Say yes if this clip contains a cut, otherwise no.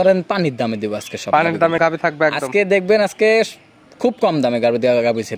no